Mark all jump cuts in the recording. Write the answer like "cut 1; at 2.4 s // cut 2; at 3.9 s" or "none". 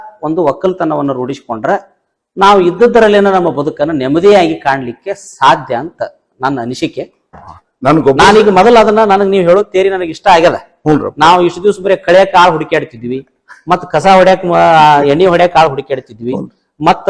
cut 1; at 7.4 s